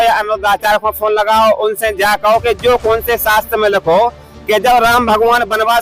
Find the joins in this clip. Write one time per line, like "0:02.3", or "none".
none